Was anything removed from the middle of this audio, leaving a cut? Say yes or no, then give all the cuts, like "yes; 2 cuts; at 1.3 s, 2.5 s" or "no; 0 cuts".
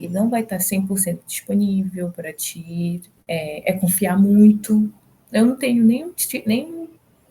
no; 0 cuts